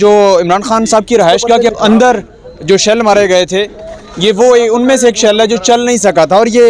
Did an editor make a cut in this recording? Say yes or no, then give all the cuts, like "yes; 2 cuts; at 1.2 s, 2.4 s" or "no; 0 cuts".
yes; 1 cut; at 1.7 s